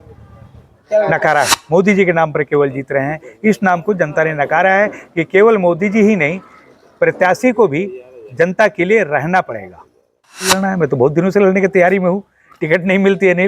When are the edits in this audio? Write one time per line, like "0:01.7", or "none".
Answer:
0:01.6
0:10.5